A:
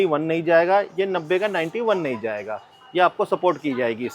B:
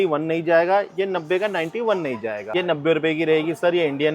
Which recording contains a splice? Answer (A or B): B